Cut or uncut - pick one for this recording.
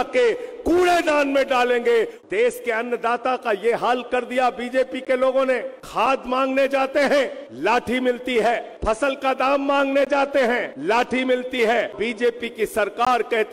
cut